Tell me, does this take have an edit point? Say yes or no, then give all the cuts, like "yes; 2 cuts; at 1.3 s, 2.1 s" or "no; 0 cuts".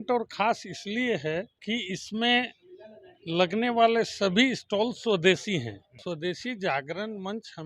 yes; 2 cuts; at 1.5 s, 5.9 s